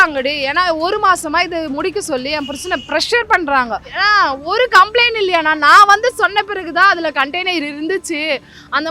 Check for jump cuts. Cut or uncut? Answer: cut